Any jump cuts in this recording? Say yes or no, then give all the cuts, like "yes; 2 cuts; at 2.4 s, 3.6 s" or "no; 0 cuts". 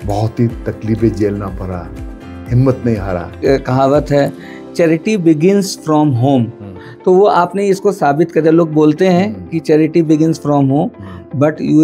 yes; 1 cut; at 3.4 s